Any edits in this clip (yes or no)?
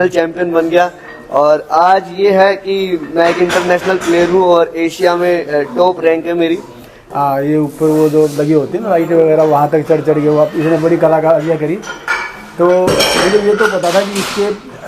yes